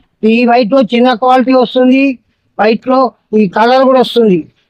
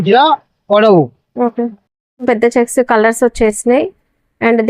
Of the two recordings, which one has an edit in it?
second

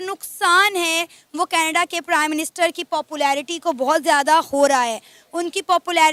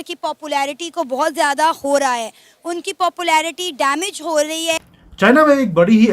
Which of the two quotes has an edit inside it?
second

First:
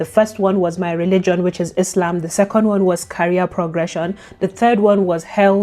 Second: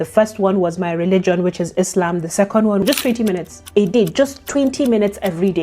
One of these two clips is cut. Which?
second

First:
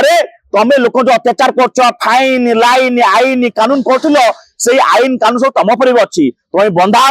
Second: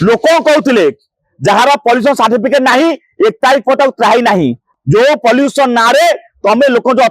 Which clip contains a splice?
second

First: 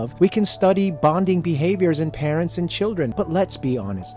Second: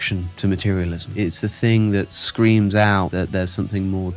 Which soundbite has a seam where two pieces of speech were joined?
first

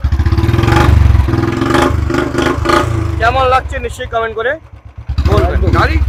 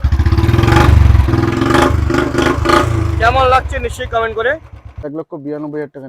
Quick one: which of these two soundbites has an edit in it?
second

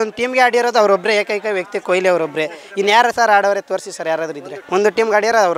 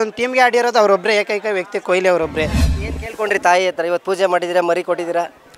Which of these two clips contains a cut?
second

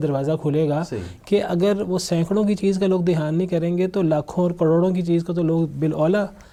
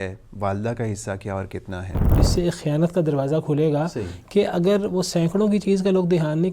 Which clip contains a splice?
second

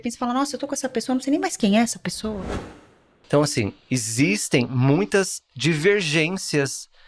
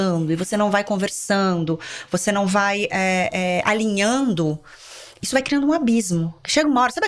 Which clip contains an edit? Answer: first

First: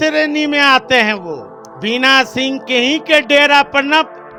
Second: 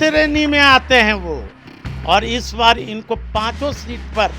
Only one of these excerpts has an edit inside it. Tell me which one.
second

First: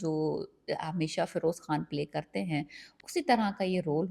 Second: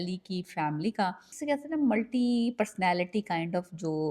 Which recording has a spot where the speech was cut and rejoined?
second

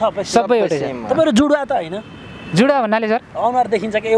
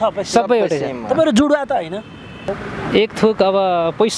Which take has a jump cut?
second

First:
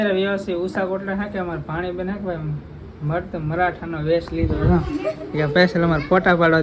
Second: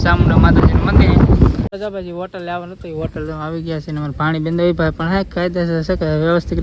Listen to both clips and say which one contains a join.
second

